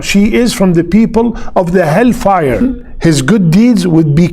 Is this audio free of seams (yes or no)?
no